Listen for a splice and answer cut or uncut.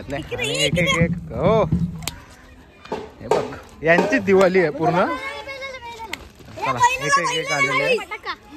uncut